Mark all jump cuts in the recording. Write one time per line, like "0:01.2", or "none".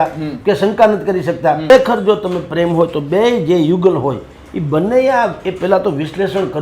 0:01.7